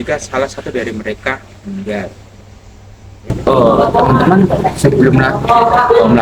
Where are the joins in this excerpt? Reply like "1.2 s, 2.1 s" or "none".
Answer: 3.3 s